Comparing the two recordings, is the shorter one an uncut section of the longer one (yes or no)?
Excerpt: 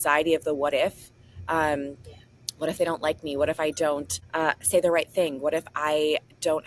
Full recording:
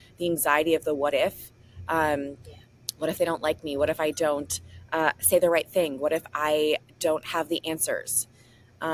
no